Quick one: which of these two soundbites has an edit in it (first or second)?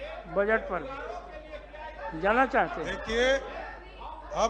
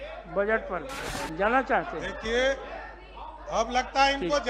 second